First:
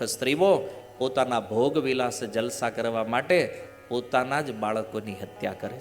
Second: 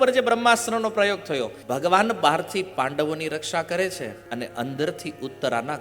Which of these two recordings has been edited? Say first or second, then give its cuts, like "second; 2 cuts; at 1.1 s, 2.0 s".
second; 2 cuts; at 1.6 s, 4.2 s